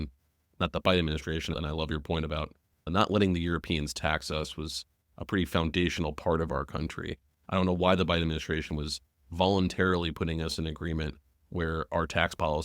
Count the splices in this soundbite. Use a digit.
2